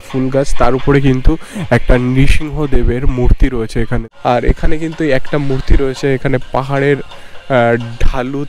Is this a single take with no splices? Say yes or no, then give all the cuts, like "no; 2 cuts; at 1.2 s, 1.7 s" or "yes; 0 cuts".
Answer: no; 1 cut; at 4.0 s